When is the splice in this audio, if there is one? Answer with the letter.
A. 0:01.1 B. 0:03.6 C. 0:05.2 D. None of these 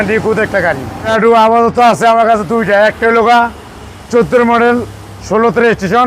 A